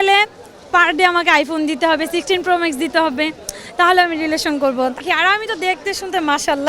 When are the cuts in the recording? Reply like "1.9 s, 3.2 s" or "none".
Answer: 5.0 s